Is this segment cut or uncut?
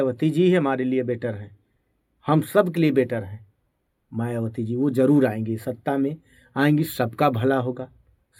uncut